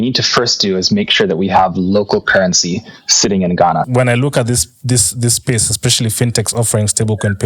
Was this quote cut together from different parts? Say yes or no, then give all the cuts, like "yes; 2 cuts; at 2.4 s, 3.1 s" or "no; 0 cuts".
yes; 1 cut; at 3.9 s